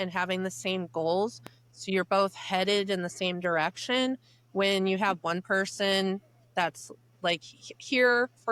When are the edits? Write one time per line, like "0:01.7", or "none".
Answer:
none